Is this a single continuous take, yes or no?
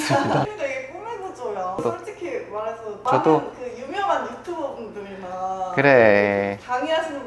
no